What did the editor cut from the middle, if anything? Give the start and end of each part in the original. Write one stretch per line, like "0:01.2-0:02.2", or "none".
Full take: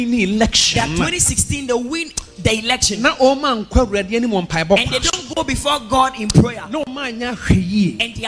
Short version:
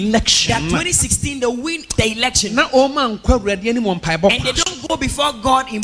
0:02.1-0:02.3